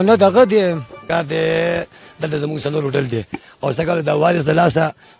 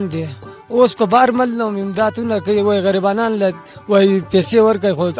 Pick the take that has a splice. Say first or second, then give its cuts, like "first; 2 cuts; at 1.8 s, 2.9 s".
first; 1 cut; at 1.0 s